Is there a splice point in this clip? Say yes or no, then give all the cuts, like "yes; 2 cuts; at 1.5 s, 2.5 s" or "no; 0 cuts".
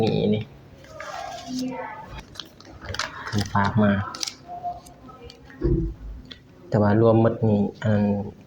yes; 1 cut; at 2.2 s